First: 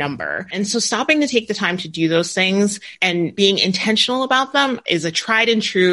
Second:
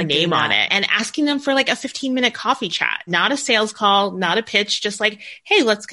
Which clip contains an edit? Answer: first; 2 cuts; at 2.9 s, 4.8 s

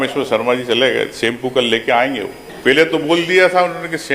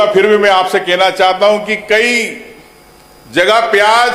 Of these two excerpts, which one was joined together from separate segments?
first; 1 cut; at 2.4 s

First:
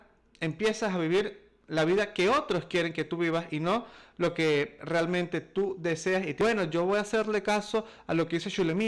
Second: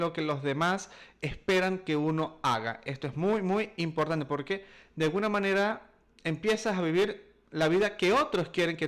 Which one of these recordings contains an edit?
first; 1 cut; at 6.4 s

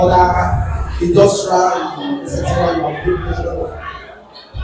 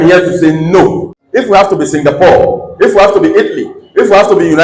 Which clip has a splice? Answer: second; 1 cut; at 1.1 s

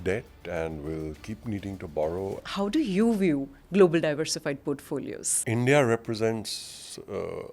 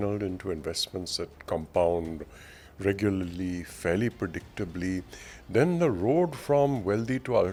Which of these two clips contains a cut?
first; 2 cuts; at 2.4 s, 5.3 s

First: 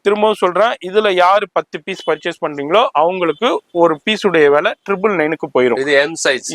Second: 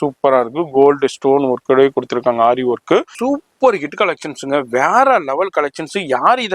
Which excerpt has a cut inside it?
second; 1 cut; at 3.1 s

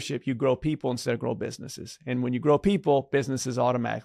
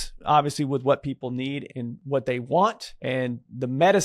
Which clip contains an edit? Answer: second; 2 cuts; at 1.7 s, 2.9 s

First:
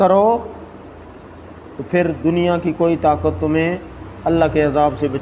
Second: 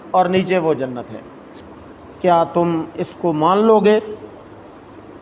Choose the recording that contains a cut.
second; 1 cut; at 1.4 s

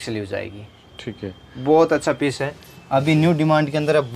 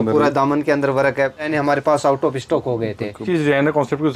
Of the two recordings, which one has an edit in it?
second; 2 cuts; at 1.5 s, 3.2 s

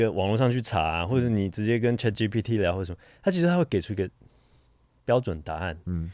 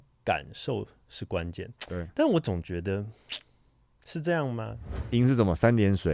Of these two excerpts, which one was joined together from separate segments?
second; 1 cut; at 5.1 s

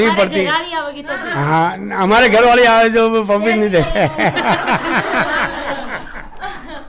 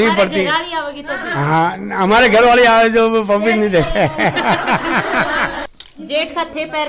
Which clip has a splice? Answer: second; 1 cut; at 5.6 s

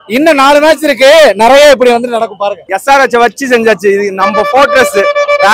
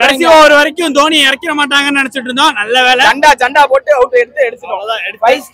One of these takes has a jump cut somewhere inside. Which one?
first; 1 cut; at 2.6 s

